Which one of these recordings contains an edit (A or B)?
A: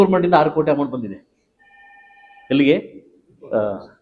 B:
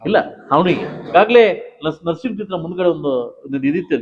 B